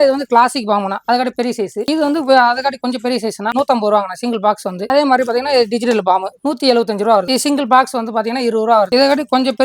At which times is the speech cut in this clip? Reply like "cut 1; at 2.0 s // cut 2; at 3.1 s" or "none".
cut 1; at 3.5 s // cut 2; at 4.8 s // cut 3; at 7.3 s